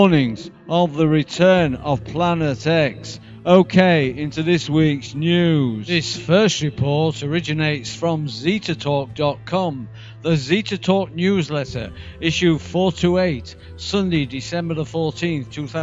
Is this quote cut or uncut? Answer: cut